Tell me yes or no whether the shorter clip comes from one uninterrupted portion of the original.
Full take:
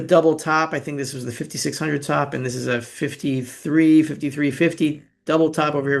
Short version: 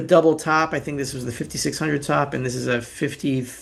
yes